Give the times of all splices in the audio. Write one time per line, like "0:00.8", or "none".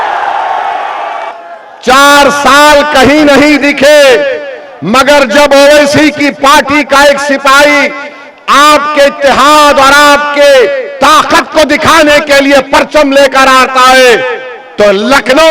0:01.3